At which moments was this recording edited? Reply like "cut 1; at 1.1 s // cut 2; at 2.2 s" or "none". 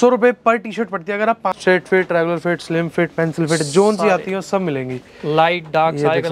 cut 1; at 1.5 s